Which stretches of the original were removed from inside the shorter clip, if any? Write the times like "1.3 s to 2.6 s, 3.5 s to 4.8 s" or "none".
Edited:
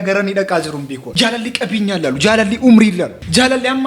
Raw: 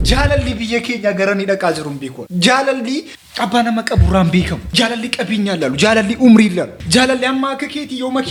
2.2 s to 4.6 s

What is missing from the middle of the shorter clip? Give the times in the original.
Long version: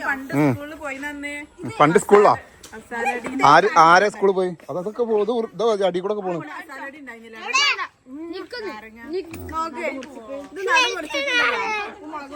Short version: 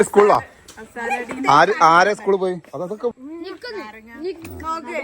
5.1 s to 8.0 s

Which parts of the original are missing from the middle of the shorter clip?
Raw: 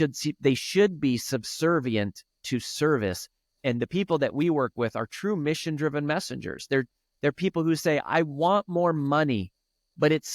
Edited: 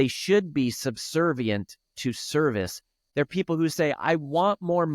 3.4 s to 7.0 s

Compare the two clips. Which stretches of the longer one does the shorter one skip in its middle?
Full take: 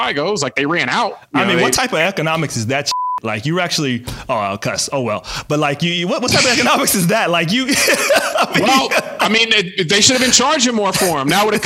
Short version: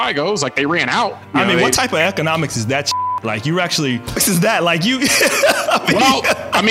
4.2 s to 6.9 s

